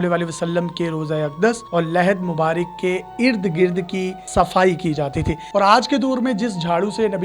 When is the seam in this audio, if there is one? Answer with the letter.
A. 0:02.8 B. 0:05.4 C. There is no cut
B